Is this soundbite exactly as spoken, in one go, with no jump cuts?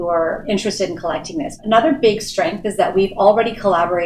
no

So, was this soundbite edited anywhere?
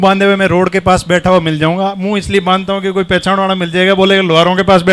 no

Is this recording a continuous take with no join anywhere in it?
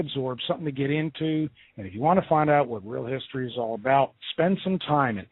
no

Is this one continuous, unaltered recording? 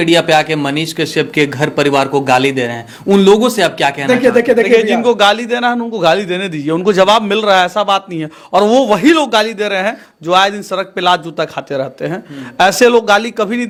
yes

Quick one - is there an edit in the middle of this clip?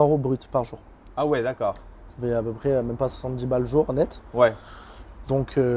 no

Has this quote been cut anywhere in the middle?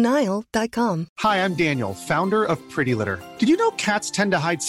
no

